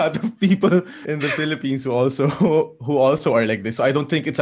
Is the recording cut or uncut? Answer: cut